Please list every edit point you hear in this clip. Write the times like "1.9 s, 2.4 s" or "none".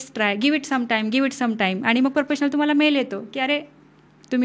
none